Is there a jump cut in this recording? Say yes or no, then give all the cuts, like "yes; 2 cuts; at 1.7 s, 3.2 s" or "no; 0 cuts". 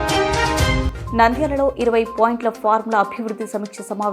yes; 1 cut; at 0.9 s